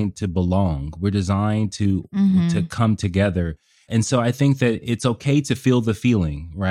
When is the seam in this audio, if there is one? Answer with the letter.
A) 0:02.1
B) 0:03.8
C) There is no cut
B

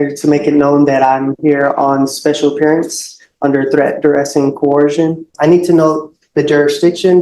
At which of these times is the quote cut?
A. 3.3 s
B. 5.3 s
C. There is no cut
B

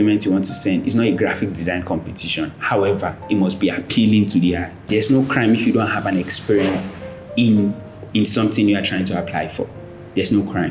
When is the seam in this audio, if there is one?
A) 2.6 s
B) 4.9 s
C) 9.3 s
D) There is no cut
B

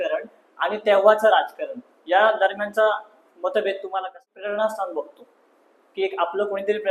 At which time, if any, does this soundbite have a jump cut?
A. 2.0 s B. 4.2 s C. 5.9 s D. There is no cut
B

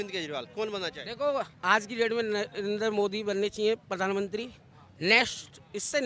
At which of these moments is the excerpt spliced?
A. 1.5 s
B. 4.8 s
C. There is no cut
A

